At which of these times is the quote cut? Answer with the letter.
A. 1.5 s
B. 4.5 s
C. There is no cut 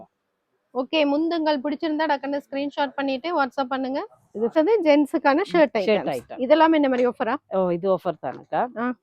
B